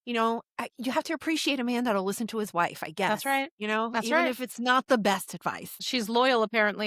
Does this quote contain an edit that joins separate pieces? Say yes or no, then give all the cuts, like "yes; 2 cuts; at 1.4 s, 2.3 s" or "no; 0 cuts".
yes; 1 cut; at 5.7 s